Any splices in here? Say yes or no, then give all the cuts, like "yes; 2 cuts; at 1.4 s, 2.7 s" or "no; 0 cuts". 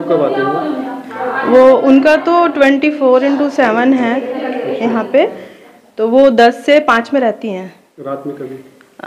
no; 0 cuts